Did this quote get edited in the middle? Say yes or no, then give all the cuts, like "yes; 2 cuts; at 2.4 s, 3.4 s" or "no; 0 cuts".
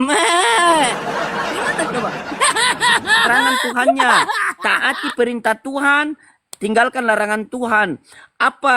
yes; 1 cut; at 4.5 s